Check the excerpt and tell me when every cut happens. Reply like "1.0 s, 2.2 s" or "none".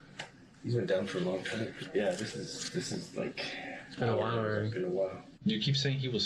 1.7 s, 5.2 s